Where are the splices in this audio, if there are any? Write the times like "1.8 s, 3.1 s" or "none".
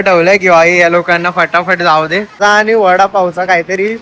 2.4 s